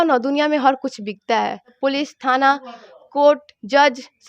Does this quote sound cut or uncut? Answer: cut